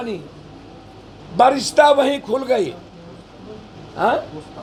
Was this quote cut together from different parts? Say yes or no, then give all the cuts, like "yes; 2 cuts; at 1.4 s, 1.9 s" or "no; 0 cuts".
no; 0 cuts